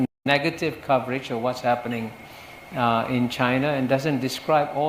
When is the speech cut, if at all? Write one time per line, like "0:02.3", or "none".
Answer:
none